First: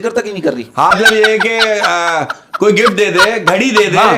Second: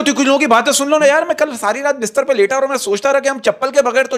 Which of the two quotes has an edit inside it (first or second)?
first